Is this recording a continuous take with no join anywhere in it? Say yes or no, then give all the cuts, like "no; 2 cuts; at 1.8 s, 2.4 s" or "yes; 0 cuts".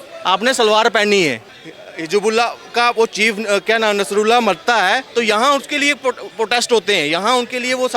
no; 1 cut; at 1.5 s